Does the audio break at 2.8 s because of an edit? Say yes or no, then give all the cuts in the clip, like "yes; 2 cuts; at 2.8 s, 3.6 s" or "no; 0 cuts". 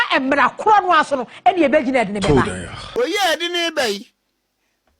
yes; 1 cut; at 2.8 s